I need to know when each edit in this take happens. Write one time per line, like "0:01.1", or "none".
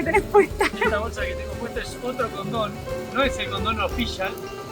none